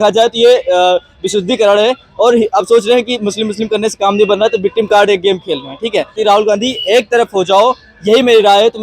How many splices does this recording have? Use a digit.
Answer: 1